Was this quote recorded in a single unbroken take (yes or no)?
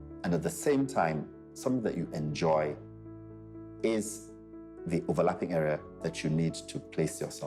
yes